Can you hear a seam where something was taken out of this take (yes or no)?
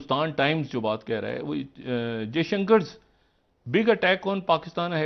no